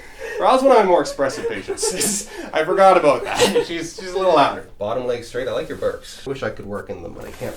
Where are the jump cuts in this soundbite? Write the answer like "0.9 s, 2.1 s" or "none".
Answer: 4.7 s, 6.3 s